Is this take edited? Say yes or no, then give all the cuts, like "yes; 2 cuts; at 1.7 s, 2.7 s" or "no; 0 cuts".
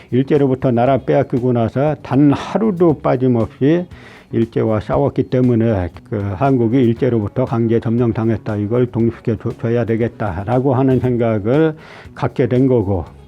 yes; 1 cut; at 5.9 s